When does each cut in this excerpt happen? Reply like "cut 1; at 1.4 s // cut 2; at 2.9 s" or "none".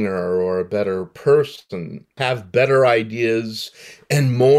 cut 1; at 2.1 s

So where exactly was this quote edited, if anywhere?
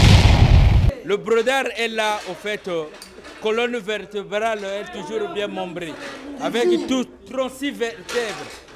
cut 1; at 0.9 s

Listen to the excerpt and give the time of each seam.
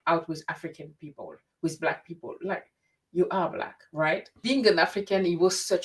cut 1; at 4.4 s

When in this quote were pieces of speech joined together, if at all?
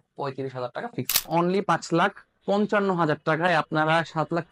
cut 1; at 1.3 s

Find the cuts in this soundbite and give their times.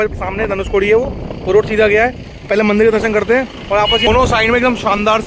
cut 1; at 4.1 s

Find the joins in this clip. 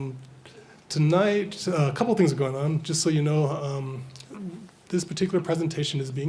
none

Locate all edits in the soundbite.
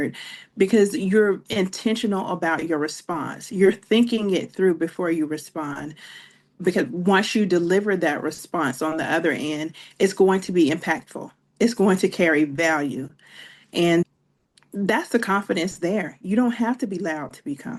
none

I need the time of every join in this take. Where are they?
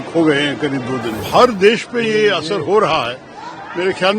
cut 1; at 1.2 s

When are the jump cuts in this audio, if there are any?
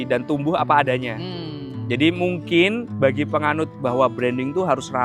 cut 1; at 2.9 s // cut 2; at 3.7 s

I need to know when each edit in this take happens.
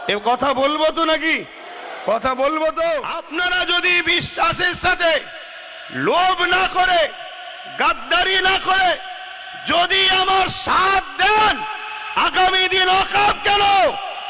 cut 1; at 3.2 s

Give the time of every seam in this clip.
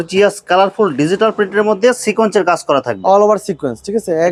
none

